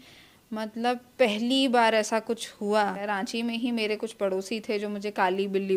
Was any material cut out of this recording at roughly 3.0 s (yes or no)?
yes